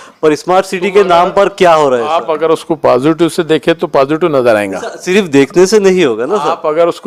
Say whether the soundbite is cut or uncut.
uncut